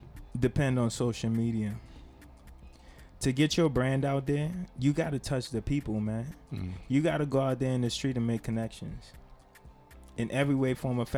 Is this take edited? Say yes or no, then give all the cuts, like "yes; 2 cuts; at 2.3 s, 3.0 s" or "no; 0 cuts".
no; 0 cuts